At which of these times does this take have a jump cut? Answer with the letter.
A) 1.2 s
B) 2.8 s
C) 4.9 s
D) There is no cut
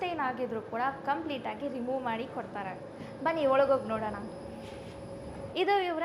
D